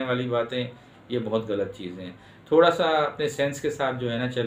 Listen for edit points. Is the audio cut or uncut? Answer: uncut